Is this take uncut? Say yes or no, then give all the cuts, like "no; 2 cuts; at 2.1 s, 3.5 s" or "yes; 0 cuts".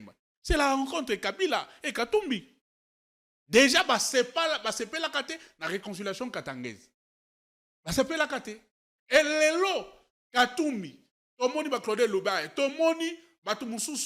yes; 0 cuts